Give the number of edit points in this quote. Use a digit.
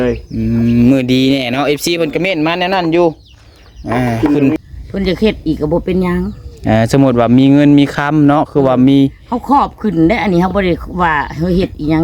1